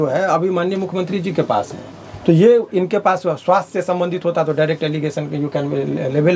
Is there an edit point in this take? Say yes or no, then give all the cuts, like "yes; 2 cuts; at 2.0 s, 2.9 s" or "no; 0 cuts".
no; 0 cuts